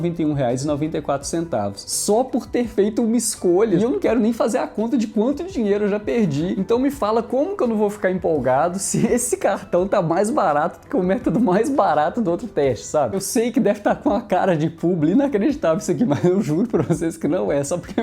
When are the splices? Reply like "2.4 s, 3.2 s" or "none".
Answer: 3.8 s, 6.5 s, 13.1 s